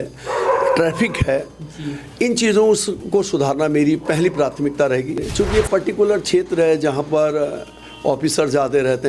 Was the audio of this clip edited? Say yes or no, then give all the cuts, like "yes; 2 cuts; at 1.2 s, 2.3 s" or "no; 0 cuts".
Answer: yes; 1 cut; at 5.2 s